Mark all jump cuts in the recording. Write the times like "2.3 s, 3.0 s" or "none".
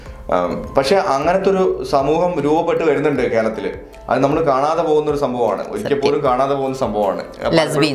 none